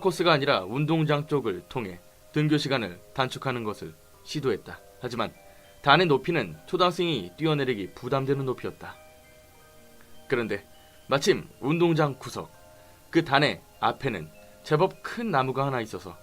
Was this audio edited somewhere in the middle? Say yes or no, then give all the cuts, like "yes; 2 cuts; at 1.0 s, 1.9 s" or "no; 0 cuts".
yes; 1 cut; at 1.8 s